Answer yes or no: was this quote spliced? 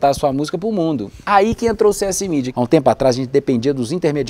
yes